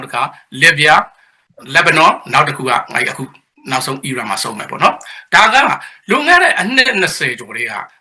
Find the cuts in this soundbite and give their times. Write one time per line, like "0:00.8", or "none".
none

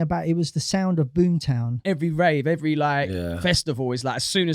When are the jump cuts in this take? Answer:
0:01.8

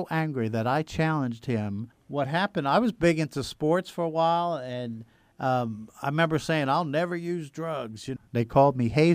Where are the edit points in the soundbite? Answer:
0:02.0
0:08.2

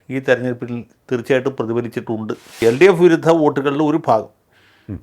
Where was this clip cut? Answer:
0:02.6

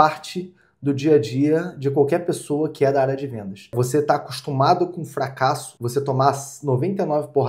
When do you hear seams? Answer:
0:03.7
0:05.7

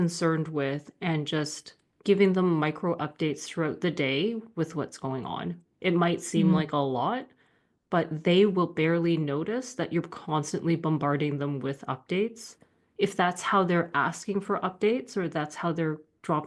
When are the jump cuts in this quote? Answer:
none

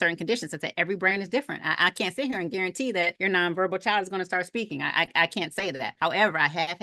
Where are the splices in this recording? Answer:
0:03.2
0:05.9

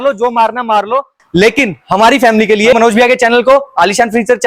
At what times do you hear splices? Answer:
0:01.2
0:02.7

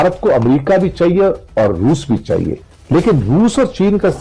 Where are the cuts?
0:02.5

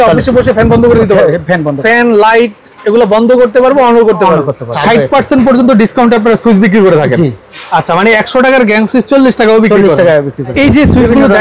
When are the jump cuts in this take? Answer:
0:01.8
0:04.7
0:10.6

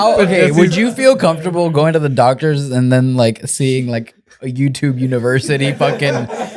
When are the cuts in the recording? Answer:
none

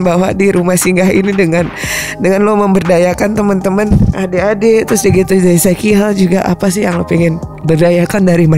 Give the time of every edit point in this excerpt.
0:07.5

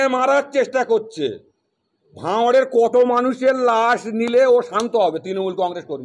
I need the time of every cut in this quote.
none

